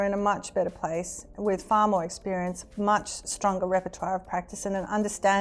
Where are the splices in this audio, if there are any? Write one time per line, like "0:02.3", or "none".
none